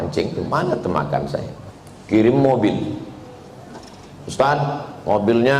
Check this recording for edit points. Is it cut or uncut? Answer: cut